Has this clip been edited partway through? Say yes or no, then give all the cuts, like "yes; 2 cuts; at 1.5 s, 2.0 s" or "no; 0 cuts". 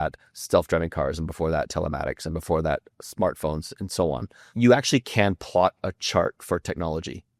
yes; 1 cut; at 4.4 s